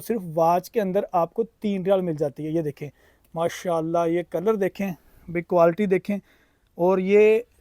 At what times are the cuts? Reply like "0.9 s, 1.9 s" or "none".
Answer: none